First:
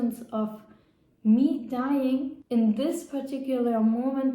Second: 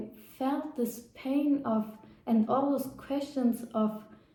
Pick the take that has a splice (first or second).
first